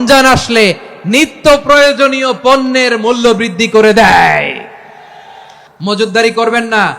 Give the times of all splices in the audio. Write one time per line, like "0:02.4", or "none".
0:05.6